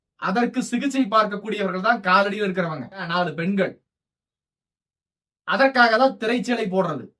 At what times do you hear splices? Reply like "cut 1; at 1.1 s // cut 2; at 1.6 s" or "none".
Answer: cut 1; at 3.1 s